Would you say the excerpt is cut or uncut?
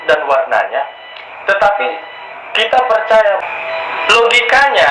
cut